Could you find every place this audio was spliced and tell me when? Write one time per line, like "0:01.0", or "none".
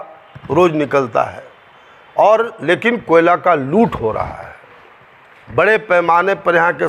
none